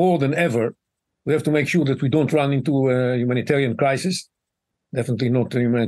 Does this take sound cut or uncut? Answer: uncut